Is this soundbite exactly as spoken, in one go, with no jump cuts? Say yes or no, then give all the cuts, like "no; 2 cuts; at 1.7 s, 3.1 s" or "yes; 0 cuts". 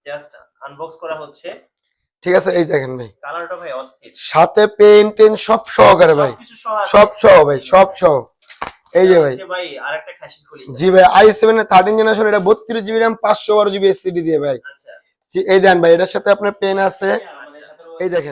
yes; 0 cuts